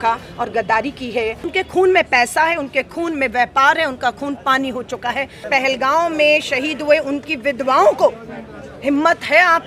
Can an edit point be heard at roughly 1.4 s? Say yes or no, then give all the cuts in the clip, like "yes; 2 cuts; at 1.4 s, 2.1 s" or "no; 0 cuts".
yes; 2 cuts; at 1.4 s, 5.4 s